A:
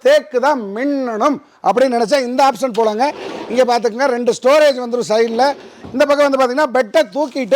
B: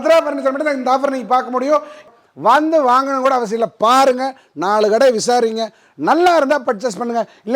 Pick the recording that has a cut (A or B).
B